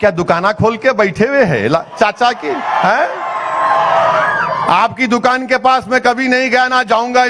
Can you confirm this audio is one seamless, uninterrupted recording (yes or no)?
yes